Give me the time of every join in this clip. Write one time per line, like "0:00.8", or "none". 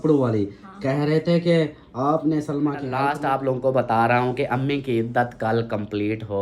0:03.1

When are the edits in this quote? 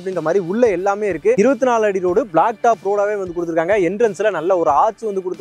0:01.4

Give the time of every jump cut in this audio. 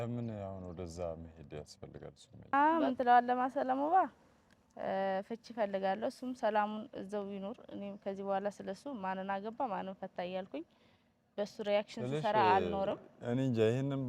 0:02.5

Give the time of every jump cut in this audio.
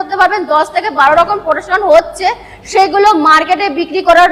none

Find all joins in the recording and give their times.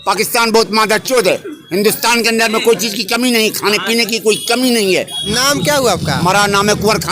0:05.2

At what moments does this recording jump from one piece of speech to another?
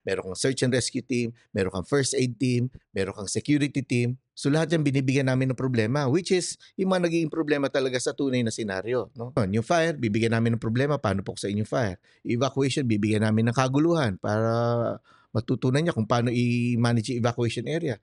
0:04.2
0:09.4

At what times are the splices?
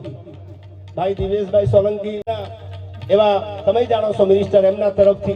0:02.3

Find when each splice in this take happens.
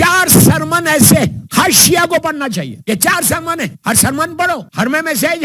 0:01.4
0:02.7
0:03.8
0:04.7

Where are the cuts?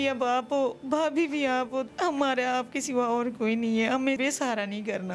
0:01.9
0:04.2

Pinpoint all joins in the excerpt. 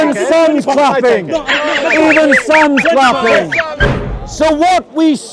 0:03.8

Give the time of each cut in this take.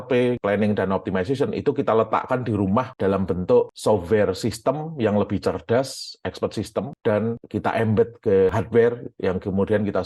0:08.5

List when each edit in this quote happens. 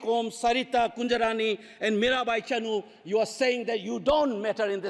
none

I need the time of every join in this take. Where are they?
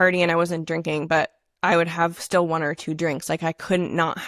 none

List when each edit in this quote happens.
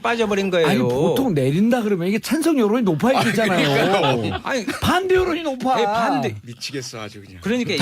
0:06.8

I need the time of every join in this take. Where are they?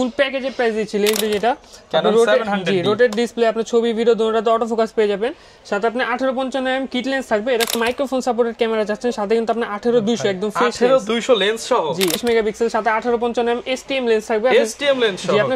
0:01.2
0:07.7
0:12.2

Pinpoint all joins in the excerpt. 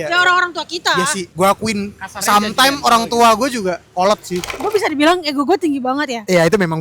0:01.2
0:04.6

